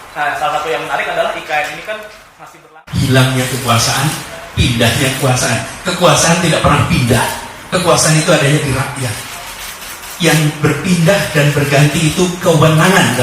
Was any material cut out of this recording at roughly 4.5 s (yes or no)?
no